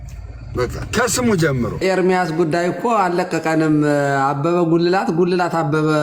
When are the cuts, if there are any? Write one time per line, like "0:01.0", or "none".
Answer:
0:01.8